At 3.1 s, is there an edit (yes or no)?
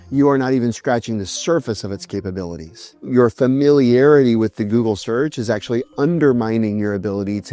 yes